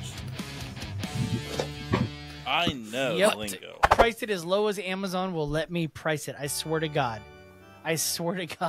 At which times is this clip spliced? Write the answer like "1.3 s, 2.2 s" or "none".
3.9 s